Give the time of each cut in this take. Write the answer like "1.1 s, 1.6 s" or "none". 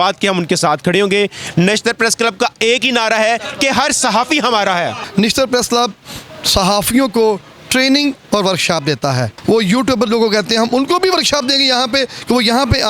5.0 s, 9.3 s